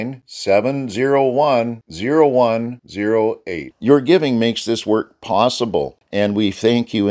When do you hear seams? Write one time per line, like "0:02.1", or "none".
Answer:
0:06.0